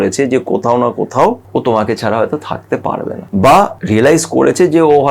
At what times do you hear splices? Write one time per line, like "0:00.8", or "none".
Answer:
0:01.4
0:03.2
0:03.8